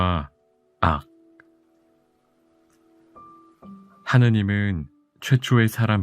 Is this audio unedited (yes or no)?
no